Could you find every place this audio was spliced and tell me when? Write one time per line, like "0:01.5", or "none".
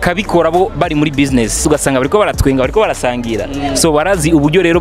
0:01.6